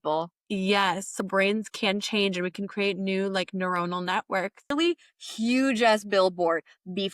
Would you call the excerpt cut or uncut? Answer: cut